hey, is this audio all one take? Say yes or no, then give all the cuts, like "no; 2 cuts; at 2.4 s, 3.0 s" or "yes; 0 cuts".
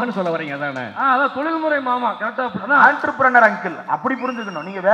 yes; 0 cuts